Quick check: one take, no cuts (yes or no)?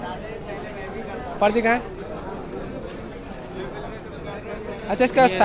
yes